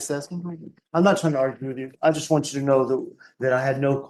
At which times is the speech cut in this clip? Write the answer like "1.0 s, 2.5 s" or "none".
none